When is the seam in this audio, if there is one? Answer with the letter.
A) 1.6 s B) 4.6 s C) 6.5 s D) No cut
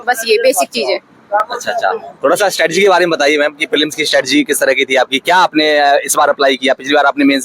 D